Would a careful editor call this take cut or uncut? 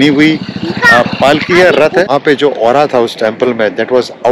cut